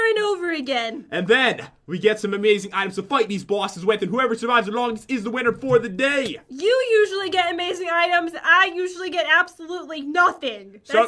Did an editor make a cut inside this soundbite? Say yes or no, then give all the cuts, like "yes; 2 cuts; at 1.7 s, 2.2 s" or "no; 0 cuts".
yes; 1 cut; at 1.0 s